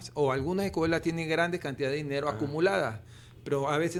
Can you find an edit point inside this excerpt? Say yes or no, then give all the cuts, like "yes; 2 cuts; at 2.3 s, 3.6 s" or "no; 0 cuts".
no; 0 cuts